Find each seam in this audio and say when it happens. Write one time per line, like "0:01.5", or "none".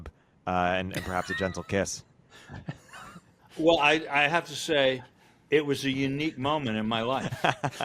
0:03.4